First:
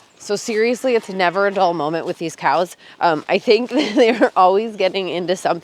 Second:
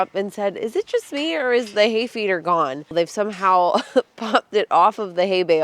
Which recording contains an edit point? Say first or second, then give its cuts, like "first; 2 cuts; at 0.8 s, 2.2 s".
second; 1 cut; at 2.9 s